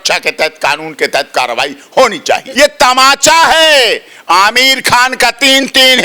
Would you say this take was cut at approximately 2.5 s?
yes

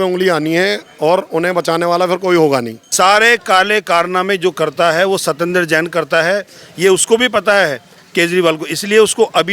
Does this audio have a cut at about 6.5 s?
no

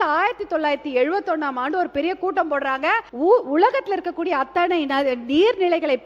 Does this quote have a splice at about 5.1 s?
no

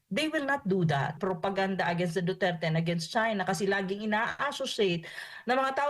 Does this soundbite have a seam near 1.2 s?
yes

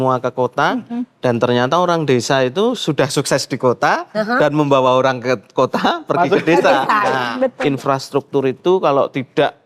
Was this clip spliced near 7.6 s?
yes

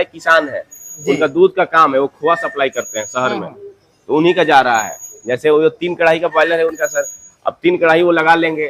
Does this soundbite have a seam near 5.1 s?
no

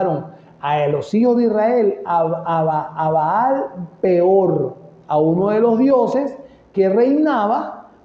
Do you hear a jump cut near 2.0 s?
no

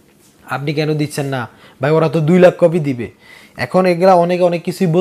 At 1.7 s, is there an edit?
no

